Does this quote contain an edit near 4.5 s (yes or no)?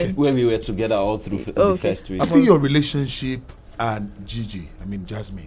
no